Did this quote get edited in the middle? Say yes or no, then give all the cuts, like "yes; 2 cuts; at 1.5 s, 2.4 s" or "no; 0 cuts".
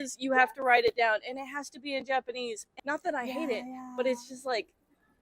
yes; 1 cut; at 2.7 s